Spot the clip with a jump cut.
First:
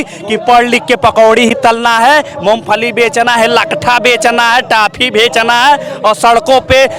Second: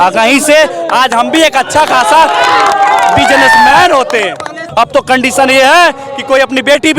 second; 1 cut; at 4.6 s

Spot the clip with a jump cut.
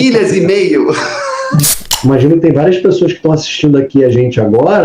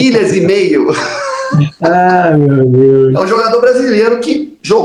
first; 1 cut; at 1.7 s

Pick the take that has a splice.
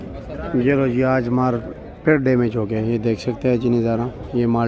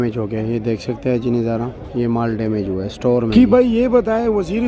second; 1 cut; at 3.3 s

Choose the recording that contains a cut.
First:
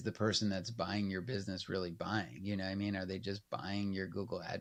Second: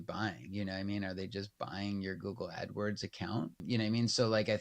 second; 1 cut; at 3.6 s

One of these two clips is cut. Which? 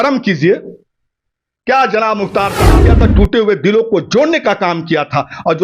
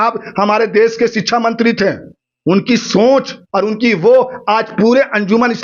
first; 1 cut; at 2.9 s

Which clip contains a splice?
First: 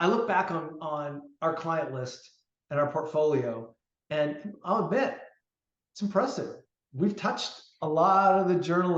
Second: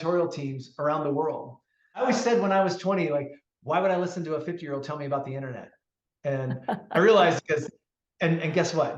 second; 1 cut; at 2.0 s

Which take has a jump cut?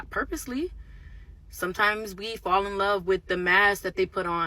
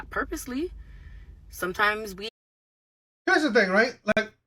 first; 1 cut; at 2.3 s

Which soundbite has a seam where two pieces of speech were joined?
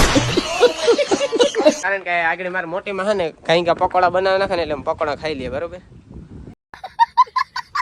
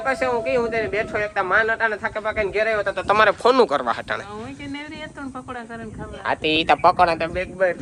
first; 2 cuts; at 1.8 s, 6.3 s

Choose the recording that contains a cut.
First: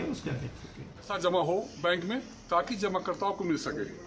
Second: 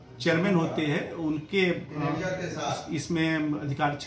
first; 1 cut; at 1.1 s

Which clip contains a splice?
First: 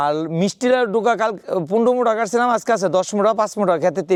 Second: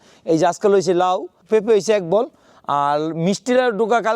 second; 1 cut; at 1.4 s

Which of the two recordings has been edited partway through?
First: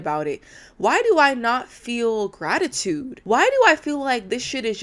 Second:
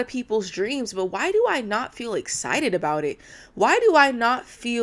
first; 1 cut; at 3.1 s

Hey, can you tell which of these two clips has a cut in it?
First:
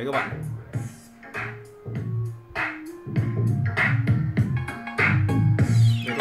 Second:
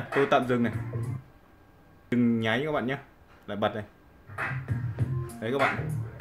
second; 1 cut; at 2.1 s

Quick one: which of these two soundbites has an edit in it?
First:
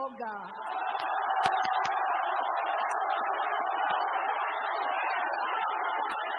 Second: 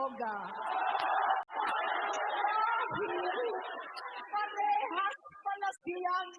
second; 1 cut; at 1.4 s

